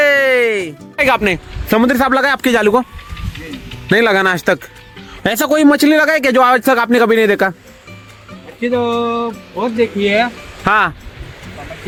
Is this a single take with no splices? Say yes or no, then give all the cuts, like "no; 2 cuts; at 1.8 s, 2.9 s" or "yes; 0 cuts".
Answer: yes; 0 cuts